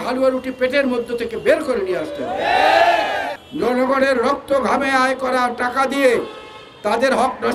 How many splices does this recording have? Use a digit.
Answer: 1